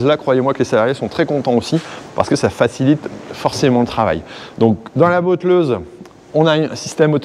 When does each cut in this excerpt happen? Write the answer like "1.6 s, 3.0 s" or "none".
none